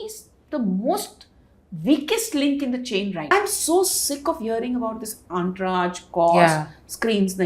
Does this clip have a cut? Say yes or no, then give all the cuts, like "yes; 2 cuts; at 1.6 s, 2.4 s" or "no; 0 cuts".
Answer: yes; 1 cut; at 3.3 s